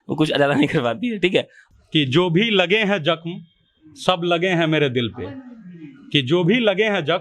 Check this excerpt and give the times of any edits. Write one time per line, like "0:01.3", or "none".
0:01.6